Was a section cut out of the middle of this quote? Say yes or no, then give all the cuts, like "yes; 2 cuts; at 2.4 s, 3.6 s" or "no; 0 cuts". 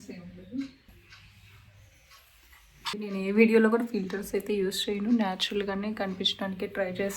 yes; 2 cuts; at 0.9 s, 3.0 s